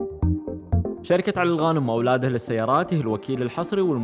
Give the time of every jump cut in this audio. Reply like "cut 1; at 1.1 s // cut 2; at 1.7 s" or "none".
cut 1; at 1.1 s